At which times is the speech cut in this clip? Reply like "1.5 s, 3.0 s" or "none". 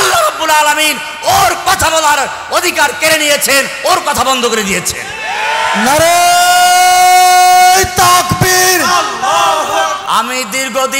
10.0 s